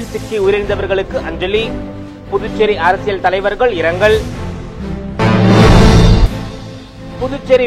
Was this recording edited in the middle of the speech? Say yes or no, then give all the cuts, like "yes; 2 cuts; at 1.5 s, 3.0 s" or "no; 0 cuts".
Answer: no; 0 cuts